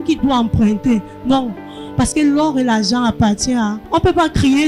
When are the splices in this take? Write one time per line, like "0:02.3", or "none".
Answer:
0:03.8